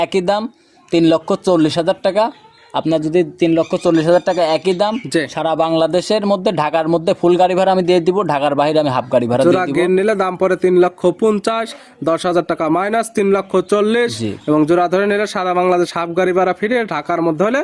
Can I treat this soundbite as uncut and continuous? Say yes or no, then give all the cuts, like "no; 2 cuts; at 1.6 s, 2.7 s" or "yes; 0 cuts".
yes; 0 cuts